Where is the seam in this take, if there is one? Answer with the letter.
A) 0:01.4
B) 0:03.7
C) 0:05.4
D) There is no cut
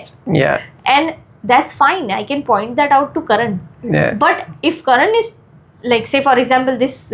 D